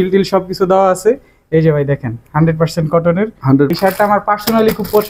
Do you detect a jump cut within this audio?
yes; 1 cut; at 3.7 s

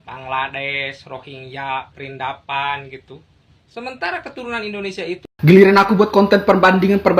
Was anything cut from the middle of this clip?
yes; 1 cut; at 5.3 s

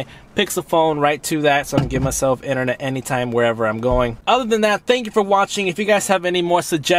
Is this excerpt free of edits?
yes; 0 cuts

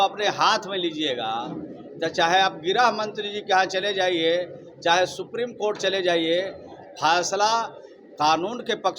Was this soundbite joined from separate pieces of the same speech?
no; 0 cuts

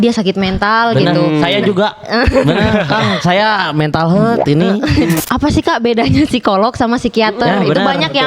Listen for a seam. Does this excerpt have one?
yes; 1 cut; at 5.2 s

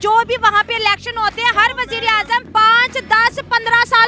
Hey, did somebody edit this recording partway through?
yes; 1 cut; at 2.5 s

